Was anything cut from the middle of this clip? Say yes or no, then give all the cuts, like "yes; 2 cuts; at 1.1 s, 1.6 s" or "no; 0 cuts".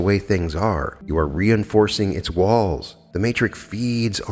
yes; 2 cuts; at 0.9 s, 3.0 s